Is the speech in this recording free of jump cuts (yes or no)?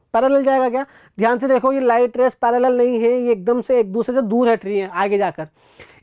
yes